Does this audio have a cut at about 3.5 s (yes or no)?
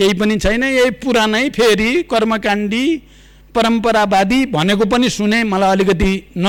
no